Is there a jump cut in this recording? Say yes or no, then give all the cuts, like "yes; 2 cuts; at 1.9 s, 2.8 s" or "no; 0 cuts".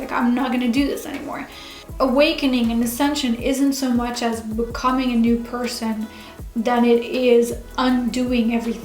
yes; 1 cut; at 1.9 s